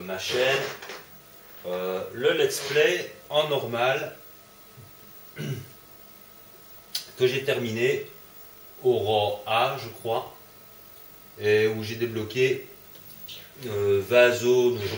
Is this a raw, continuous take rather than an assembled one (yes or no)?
yes